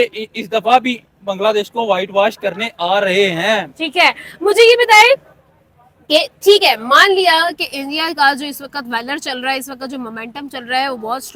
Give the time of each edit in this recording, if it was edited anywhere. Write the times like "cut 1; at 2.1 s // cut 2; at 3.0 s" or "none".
none